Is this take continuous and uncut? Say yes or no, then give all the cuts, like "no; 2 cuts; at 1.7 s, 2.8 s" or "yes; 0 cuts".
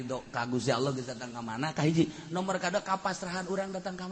yes; 0 cuts